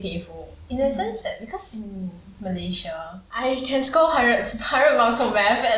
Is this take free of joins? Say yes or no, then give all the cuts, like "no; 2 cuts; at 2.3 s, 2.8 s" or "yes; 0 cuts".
no; 2 cuts; at 1.8 s, 3.2 s